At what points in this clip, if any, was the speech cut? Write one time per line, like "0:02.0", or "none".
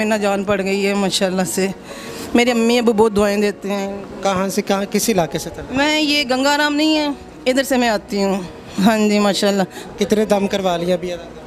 none